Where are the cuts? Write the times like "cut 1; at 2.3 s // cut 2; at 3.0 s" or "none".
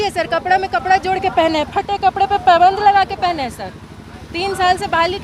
none